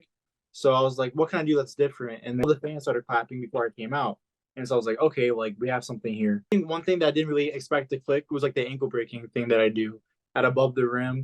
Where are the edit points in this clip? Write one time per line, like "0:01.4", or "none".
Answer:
0:02.4
0:06.5
0:10.1